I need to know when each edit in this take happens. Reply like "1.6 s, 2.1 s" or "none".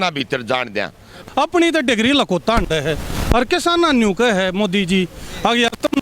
1.2 s